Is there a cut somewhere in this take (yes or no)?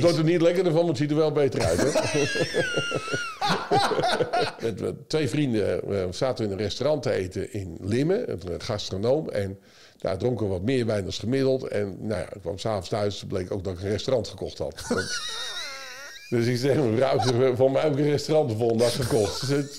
yes